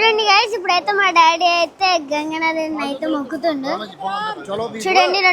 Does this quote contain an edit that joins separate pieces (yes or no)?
no